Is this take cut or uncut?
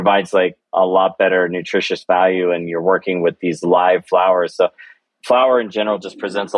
uncut